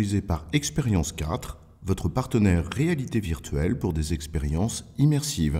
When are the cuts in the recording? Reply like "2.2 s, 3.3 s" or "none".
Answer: none